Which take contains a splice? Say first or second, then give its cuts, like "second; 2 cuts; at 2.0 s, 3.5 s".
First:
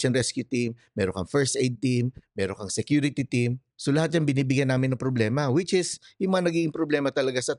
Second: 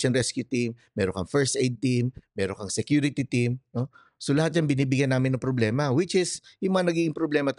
first; 1 cut; at 3.7 s